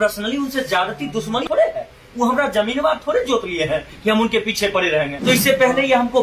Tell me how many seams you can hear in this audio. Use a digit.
2